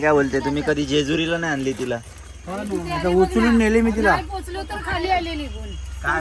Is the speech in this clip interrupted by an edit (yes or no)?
no